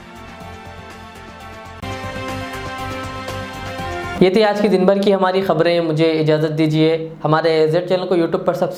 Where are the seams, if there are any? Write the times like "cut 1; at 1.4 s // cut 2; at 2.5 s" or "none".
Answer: none